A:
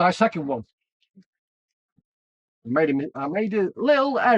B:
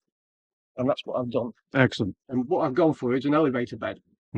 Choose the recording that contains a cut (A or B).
B